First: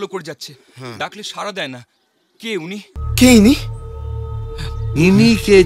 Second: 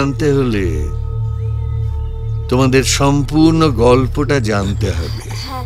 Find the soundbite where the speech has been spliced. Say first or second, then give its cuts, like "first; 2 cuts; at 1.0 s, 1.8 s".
first; 1 cut; at 3.0 s